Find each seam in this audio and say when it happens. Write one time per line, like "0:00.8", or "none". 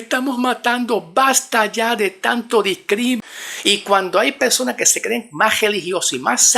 0:03.3